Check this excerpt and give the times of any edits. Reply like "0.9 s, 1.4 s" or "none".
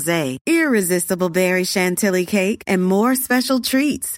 none